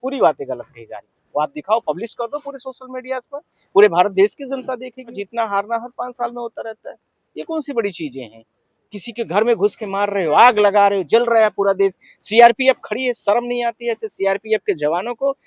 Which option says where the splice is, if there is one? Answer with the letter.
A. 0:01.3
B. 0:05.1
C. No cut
B